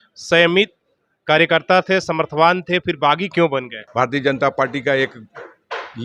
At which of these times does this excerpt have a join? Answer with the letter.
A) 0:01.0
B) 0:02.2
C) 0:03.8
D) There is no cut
C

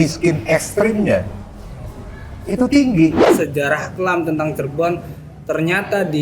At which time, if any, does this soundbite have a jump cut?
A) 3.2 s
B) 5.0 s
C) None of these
A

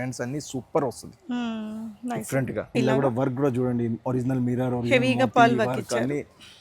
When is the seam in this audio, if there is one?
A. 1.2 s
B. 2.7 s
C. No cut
B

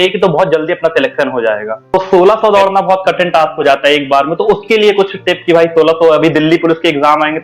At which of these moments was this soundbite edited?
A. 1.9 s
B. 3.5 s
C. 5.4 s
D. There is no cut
A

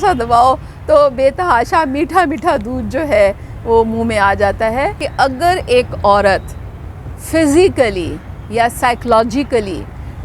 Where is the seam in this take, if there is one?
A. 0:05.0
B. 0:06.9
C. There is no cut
A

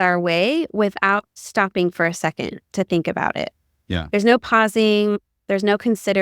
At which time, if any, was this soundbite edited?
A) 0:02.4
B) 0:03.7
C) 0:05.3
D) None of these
D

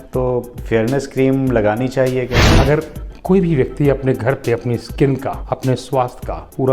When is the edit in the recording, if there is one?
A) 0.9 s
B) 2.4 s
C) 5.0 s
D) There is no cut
B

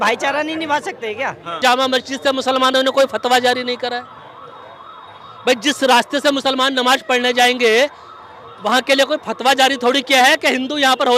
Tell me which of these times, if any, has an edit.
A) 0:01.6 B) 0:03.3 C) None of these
A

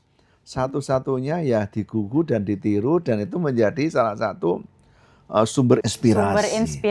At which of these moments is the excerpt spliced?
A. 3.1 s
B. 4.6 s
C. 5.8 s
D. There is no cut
C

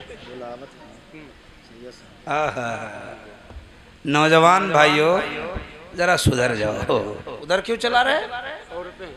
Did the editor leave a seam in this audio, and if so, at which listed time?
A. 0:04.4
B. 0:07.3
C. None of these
B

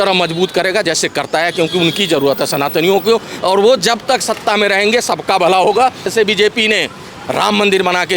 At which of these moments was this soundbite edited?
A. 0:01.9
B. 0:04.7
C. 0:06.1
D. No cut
C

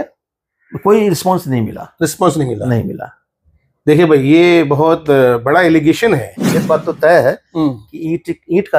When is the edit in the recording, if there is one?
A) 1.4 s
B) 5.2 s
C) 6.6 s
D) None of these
C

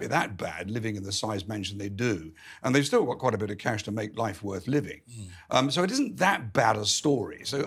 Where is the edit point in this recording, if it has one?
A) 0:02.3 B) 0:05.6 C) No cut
C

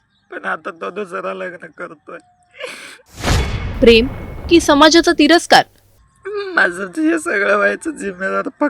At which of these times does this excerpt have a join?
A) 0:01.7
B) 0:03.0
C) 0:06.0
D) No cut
B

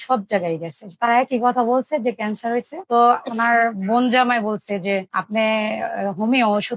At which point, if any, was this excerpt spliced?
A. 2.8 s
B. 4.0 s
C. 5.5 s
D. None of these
A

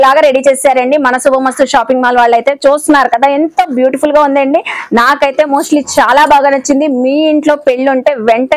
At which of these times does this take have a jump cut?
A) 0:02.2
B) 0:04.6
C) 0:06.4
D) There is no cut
D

